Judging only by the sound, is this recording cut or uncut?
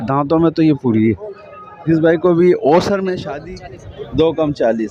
cut